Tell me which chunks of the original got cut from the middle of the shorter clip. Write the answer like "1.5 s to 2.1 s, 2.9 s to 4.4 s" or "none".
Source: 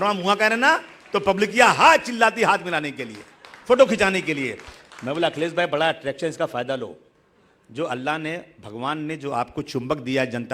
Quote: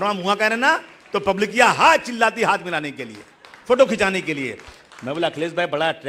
none